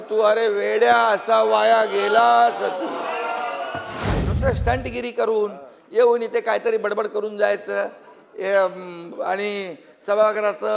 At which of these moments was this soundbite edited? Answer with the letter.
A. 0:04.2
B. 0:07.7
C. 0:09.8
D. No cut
A